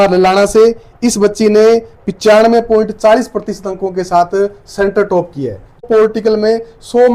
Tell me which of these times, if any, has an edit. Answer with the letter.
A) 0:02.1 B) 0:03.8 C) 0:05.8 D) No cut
C